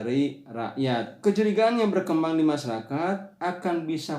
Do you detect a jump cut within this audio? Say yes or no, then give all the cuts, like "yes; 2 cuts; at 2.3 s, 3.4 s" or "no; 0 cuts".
yes; 1 cut; at 1.1 s